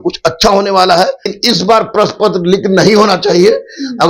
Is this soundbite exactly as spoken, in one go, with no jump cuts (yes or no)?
no